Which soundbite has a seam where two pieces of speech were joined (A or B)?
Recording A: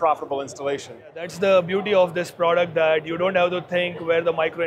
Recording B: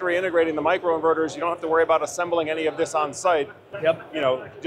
A